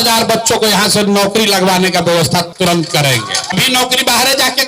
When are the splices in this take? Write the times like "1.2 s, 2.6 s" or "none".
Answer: 3.5 s